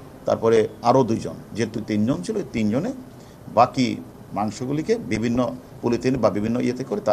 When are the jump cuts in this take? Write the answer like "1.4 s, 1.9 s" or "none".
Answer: none